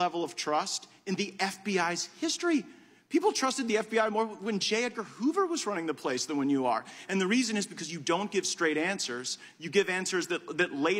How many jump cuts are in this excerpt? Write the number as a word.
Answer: zero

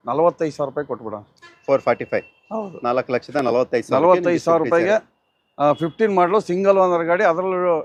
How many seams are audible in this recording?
zero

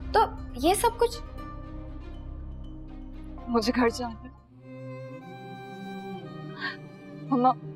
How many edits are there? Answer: one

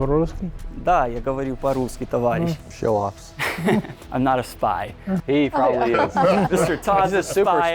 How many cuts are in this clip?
three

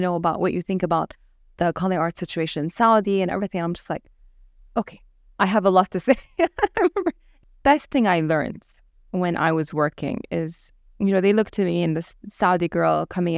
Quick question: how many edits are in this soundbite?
one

